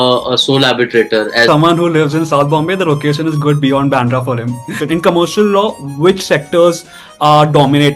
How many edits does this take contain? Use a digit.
2